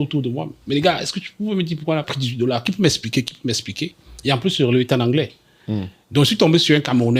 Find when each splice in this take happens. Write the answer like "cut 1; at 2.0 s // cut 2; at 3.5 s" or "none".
cut 1; at 2.1 s